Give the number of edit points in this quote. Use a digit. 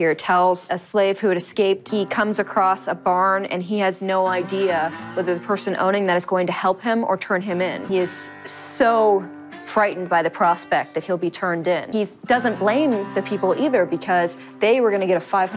0